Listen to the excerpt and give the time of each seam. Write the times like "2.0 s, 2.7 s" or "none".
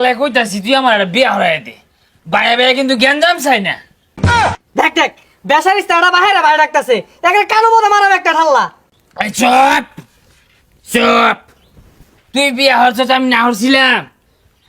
none